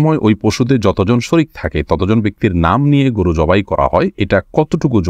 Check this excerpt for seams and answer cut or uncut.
cut